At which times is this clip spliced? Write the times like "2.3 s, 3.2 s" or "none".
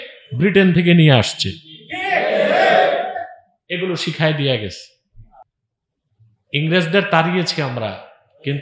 5.4 s